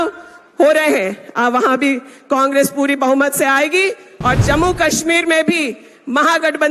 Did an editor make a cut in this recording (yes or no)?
no